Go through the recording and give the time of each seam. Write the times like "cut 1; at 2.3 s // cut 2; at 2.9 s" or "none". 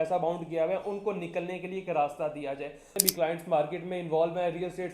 cut 1; at 2.9 s

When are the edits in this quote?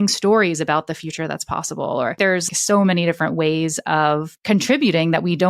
cut 1; at 2.4 s // cut 2; at 4.3 s

